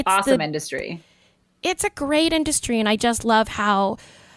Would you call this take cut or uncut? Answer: uncut